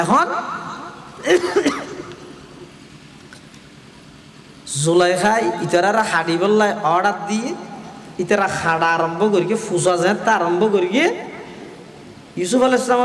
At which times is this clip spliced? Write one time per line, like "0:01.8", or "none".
none